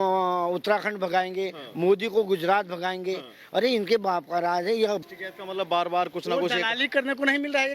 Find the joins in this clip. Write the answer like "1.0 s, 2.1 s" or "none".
5.0 s